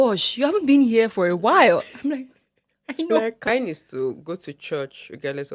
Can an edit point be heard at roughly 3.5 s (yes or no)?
yes